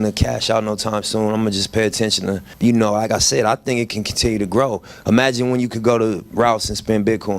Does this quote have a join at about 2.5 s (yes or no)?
yes